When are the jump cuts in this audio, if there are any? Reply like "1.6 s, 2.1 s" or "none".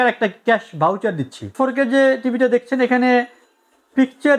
1.5 s